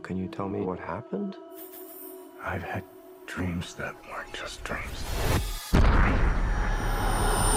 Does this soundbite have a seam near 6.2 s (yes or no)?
no